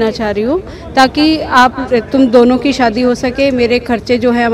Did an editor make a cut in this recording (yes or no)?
no